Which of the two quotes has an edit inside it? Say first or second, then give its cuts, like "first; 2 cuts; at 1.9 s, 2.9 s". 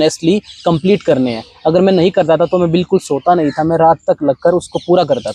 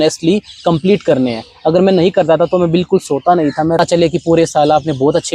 second; 1 cut; at 3.8 s